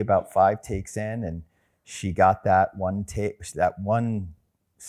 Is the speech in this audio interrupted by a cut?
no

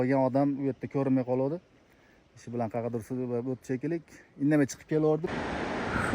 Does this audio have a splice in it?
yes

